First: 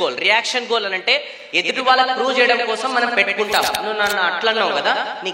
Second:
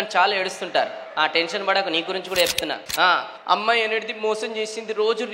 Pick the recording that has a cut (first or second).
second